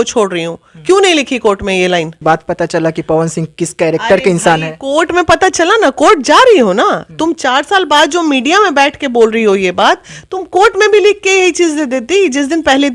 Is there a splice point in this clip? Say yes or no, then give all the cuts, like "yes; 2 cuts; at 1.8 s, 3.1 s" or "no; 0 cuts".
yes; 1 cut; at 2.2 s